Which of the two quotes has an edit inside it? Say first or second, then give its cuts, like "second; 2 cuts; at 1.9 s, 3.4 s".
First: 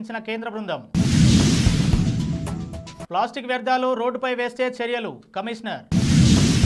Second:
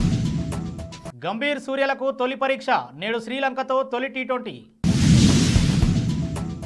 second; 1 cut; at 0.9 s